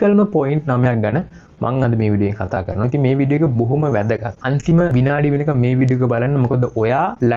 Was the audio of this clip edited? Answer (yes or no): no